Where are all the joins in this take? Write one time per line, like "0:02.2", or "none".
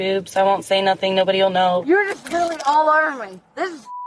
0:01.8